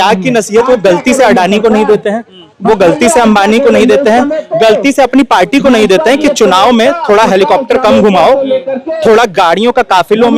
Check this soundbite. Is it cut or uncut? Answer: uncut